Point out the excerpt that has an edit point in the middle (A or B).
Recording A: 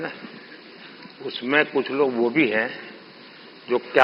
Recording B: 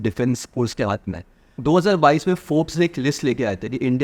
B